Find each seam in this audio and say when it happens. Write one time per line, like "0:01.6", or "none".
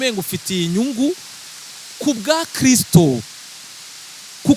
none